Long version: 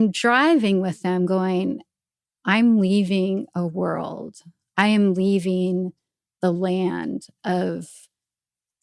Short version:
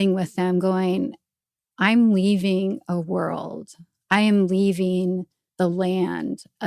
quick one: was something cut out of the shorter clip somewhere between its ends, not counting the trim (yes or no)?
yes